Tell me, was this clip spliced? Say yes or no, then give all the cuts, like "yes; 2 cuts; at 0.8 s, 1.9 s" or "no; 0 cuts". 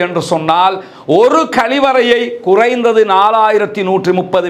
no; 0 cuts